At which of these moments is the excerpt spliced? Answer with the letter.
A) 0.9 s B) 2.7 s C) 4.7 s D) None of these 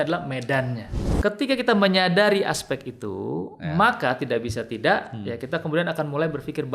A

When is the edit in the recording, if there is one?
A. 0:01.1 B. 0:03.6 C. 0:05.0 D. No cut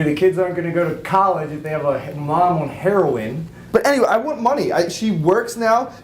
B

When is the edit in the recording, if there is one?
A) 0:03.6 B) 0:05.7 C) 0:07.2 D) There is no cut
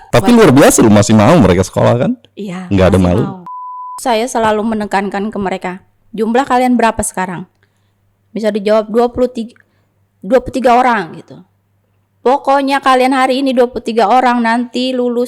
A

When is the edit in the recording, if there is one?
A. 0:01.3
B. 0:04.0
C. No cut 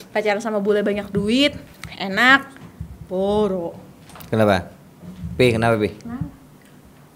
C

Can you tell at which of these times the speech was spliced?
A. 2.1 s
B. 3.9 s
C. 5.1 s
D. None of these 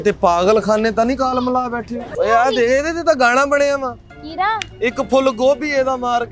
A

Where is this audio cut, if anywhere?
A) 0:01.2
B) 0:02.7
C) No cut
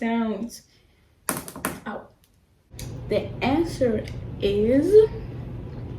B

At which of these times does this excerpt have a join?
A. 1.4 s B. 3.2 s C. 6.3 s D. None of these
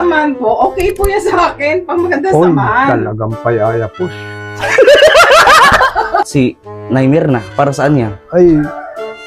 C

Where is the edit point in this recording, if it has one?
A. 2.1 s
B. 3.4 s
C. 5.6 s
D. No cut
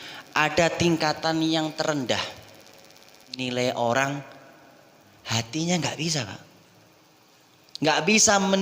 B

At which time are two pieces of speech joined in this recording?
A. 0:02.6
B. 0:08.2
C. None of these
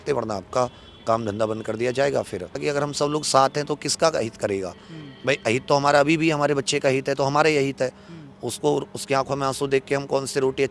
A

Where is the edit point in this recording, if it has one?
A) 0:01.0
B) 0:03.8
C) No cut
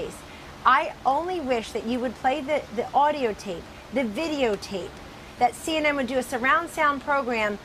A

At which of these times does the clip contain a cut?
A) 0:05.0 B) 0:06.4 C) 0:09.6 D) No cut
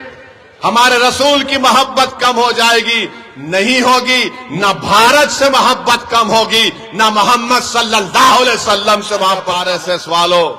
C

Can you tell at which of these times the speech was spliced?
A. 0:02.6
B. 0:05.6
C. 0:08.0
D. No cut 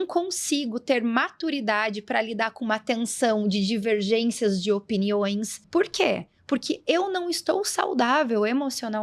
B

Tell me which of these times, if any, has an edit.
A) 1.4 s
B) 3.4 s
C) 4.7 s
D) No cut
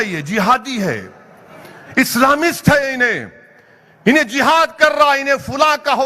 D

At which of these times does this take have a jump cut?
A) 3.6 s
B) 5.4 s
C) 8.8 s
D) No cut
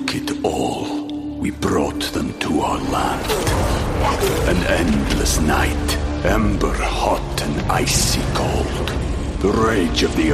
D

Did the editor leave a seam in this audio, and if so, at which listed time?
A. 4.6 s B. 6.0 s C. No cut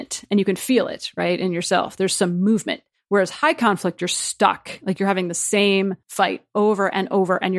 B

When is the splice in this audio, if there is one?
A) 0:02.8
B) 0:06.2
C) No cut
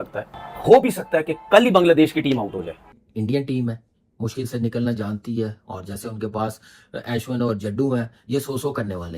A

